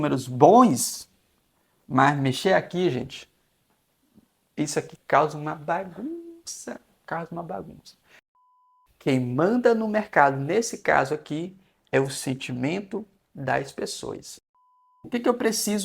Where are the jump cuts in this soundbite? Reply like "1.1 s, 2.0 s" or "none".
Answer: 8.4 s, 15.1 s